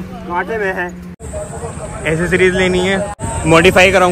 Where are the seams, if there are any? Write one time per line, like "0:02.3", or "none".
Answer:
0:01.2
0:03.3